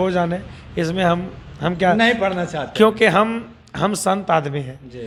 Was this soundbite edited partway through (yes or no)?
no